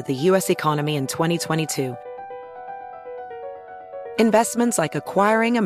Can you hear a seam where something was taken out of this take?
no; 0 cuts

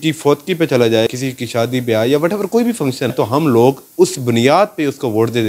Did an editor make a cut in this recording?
yes; 2 cuts; at 1.2 s, 3.1 s

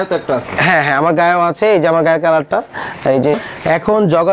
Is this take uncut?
no; 1 cut; at 3.3 s

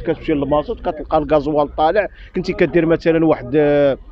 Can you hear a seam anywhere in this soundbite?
no; 0 cuts

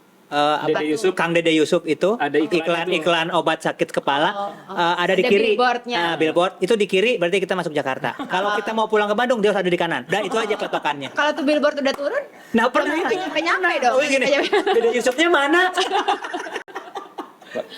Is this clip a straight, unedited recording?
yes; 0 cuts

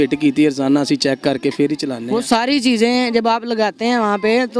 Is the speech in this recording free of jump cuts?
no; 1 cut; at 2.1 s

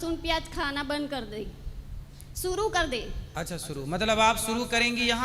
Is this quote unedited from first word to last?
yes; 0 cuts

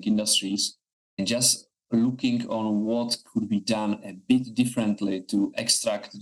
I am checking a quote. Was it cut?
no; 0 cuts

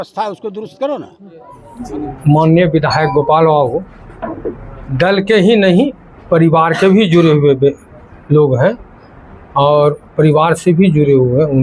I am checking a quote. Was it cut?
no; 0 cuts

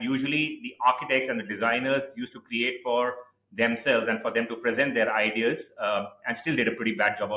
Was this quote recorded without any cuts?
yes; 0 cuts

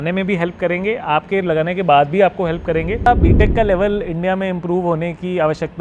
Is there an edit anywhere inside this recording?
yes; 1 cut; at 3.1 s

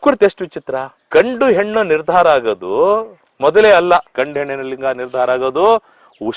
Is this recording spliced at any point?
yes; 2 cuts; at 0.9 s, 4.2 s

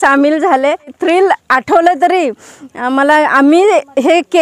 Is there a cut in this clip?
yes; 1 cut; at 0.9 s

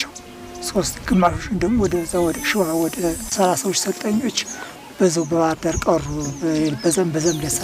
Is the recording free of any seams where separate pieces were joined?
no; 1 cut; at 3.3 s

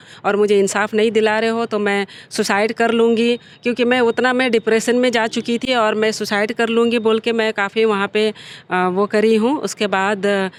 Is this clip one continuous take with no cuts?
yes; 0 cuts

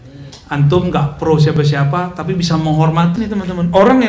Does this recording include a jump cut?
yes; 1 cut; at 3.1 s

